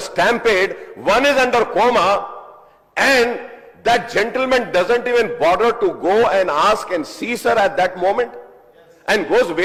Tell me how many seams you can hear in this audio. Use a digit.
0